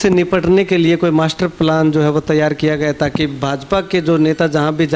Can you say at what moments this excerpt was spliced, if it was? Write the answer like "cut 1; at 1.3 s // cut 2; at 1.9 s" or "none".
none

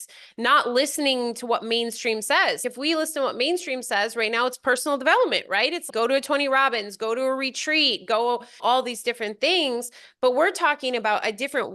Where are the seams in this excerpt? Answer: cut 1; at 2.6 s // cut 2; at 5.8 s // cut 3; at 8.6 s

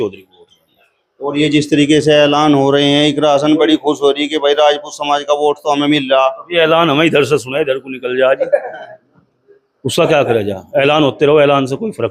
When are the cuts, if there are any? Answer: none

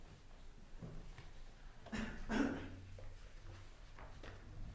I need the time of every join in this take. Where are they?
cut 1; at 3.6 s

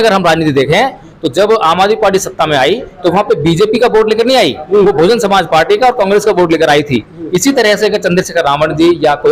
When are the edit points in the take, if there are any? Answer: none

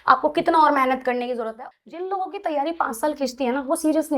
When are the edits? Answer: cut 1; at 1.4 s

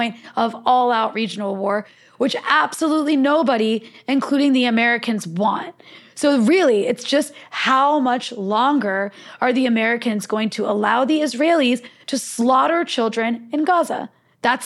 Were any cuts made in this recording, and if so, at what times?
none

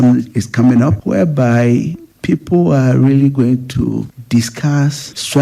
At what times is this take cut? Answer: none

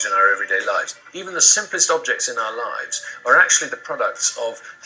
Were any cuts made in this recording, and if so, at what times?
cut 1; at 0.9 s

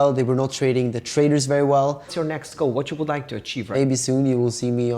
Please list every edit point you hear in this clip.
cut 1; at 2.1 s // cut 2; at 3.7 s

